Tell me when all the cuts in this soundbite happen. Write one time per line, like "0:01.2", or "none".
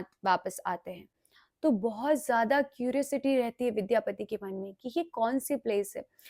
none